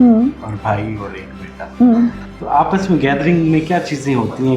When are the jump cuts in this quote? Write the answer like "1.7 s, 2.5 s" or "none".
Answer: 2.3 s